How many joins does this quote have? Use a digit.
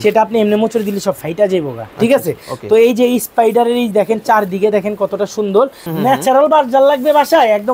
1